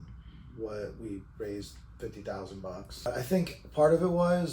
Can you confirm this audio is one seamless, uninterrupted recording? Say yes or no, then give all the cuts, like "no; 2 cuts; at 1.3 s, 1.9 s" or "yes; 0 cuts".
no; 1 cut; at 3.1 s